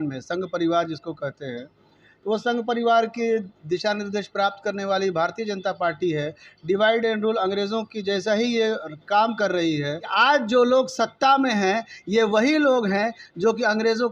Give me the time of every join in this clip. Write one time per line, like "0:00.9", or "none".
0:10.1